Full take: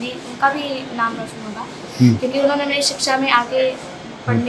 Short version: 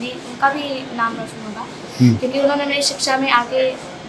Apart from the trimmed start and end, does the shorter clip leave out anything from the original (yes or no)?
no